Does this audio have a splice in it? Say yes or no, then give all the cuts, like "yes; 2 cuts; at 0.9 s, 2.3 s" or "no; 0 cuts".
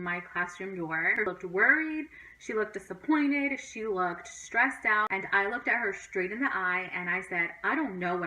yes; 2 cuts; at 1.3 s, 5.1 s